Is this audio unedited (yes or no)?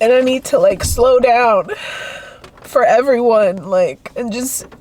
yes